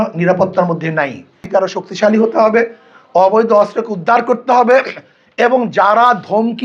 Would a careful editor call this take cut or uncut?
cut